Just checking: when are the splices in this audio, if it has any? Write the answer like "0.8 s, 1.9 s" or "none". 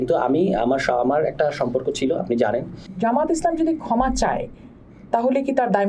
2.9 s